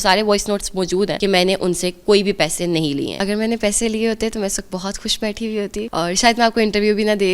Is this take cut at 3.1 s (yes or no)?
yes